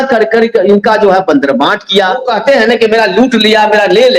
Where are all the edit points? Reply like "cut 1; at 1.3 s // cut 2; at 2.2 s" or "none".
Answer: cut 1; at 2.3 s